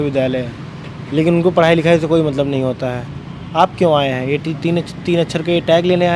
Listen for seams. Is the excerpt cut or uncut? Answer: uncut